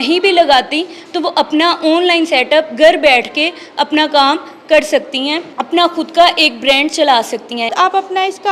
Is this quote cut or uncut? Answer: cut